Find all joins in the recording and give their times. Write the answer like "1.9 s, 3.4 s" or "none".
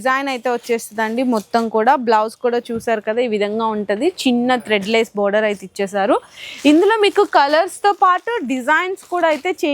none